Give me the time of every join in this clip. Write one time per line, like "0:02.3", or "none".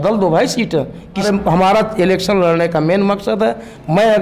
0:01.2